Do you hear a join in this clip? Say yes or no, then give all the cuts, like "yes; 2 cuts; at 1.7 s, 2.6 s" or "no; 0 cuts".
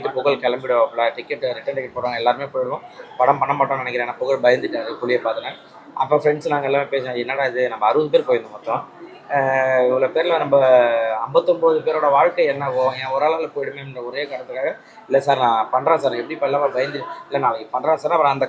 no; 0 cuts